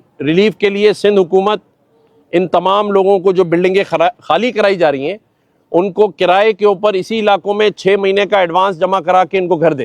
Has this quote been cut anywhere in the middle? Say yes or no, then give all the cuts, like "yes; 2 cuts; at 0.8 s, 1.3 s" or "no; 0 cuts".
no; 0 cuts